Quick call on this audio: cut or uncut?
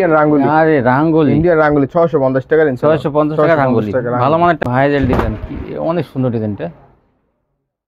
cut